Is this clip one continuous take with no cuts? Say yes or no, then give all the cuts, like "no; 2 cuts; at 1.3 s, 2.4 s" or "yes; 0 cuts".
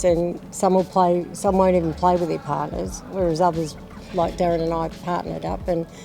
no; 1 cut; at 5.0 s